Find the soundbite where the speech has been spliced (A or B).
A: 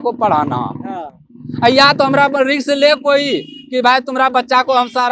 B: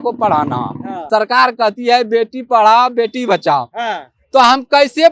B